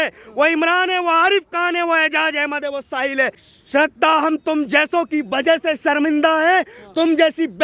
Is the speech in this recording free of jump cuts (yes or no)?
no